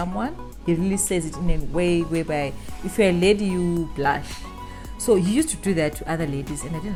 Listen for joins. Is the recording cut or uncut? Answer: uncut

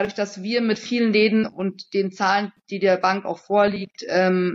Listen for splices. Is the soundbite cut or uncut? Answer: uncut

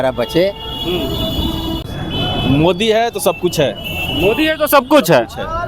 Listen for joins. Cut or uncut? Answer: cut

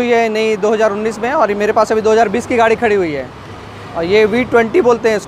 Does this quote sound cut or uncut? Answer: uncut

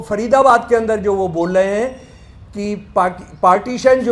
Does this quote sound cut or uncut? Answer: uncut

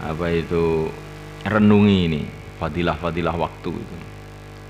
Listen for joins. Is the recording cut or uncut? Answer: cut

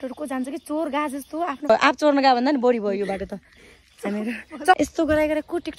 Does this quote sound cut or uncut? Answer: cut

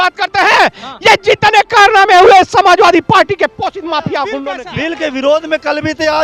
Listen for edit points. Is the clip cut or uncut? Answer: cut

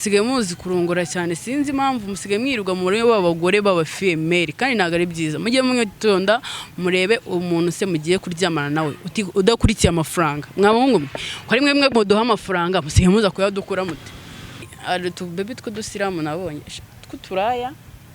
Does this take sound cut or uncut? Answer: cut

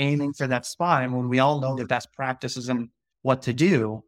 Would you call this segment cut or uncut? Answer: cut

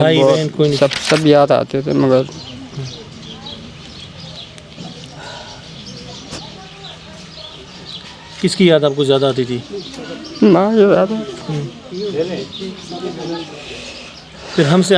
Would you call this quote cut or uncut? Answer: cut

